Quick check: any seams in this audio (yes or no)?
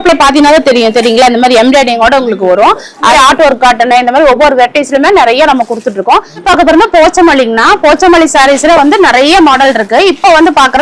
yes